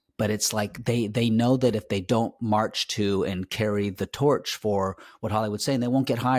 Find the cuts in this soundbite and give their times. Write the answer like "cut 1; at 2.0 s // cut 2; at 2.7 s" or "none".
none